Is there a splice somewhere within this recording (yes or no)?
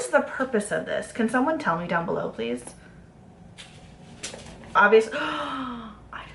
yes